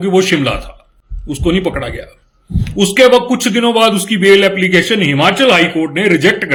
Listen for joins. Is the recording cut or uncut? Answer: uncut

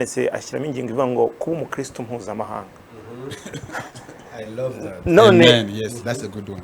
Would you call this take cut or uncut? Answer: uncut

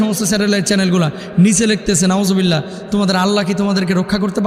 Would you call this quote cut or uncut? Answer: uncut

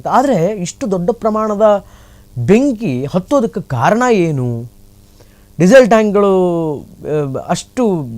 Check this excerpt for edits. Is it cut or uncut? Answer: uncut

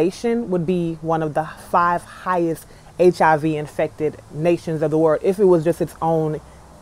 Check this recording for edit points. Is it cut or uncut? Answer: uncut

